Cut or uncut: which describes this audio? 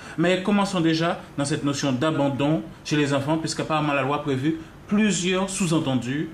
cut